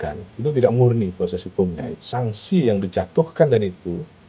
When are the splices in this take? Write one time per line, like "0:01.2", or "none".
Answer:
0:01.9